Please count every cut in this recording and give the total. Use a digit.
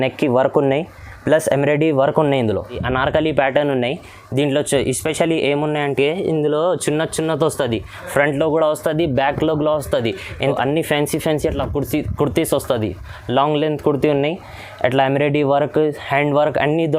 2